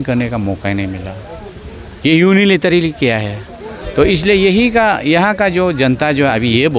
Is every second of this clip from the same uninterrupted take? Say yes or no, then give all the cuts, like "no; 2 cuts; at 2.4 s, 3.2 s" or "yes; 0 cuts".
yes; 0 cuts